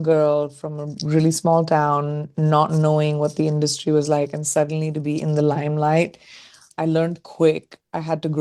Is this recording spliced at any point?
yes; 1 cut; at 6.6 s

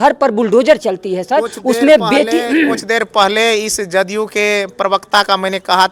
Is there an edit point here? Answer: no; 0 cuts

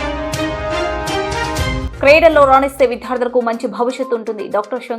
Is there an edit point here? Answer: yes; 1 cut; at 1.8 s

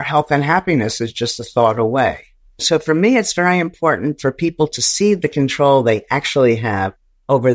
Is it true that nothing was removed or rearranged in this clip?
no; 1 cut; at 2.3 s

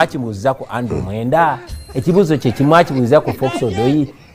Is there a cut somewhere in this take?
no; 0 cuts

